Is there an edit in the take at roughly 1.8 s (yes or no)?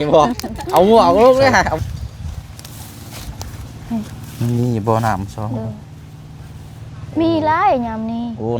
yes